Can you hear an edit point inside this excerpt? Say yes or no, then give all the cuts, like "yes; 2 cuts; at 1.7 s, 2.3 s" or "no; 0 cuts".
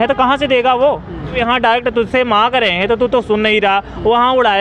yes; 1 cut; at 1.4 s